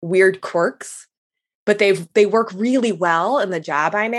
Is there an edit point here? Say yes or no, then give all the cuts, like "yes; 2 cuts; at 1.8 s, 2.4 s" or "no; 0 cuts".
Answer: no; 0 cuts